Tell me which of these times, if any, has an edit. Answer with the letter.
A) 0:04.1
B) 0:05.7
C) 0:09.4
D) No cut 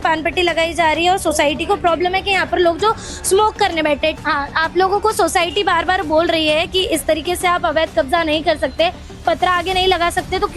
A